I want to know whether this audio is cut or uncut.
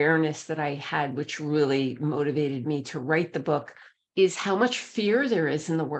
uncut